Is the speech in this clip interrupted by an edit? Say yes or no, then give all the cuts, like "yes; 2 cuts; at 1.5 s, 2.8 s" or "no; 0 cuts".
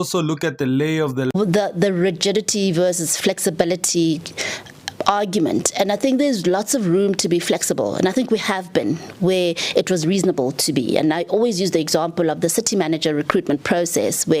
yes; 1 cut; at 1.3 s